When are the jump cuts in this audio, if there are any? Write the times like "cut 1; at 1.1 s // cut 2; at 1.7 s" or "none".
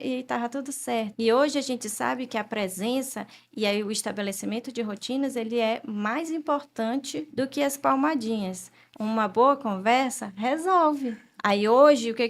cut 1; at 1.1 s // cut 2; at 7.3 s // cut 3; at 11.3 s